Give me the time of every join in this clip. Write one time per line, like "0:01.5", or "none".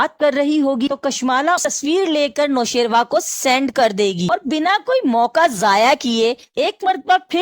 none